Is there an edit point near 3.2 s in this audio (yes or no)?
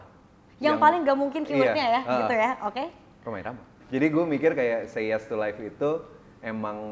yes